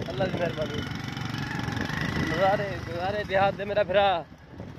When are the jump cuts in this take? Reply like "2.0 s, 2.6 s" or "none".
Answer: none